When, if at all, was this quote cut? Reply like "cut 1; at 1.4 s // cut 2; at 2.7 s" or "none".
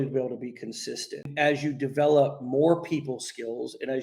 cut 1; at 1.3 s